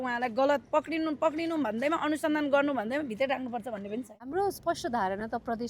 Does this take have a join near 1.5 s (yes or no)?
no